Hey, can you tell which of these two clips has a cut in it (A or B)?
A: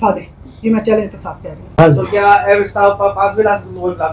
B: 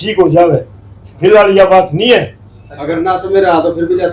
A